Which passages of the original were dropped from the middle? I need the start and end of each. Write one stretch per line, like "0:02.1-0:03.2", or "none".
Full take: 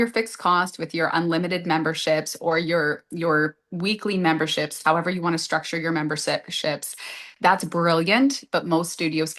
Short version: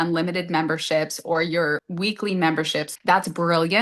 0:03.0-0:03.7
0:04.7-0:07.3